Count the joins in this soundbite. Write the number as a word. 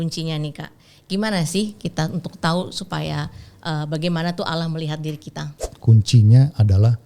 one